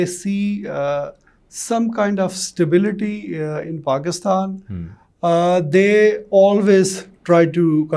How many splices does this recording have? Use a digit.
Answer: 0